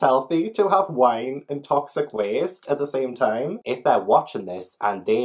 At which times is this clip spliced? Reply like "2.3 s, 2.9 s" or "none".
3.6 s